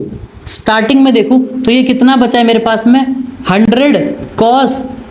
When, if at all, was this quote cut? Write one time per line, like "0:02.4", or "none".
none